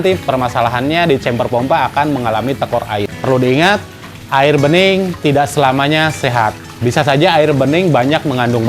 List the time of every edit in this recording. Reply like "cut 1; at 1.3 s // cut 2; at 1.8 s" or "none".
cut 1; at 3.1 s